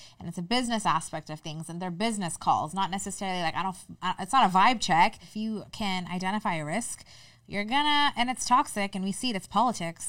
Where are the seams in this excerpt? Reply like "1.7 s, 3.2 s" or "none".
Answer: 5.3 s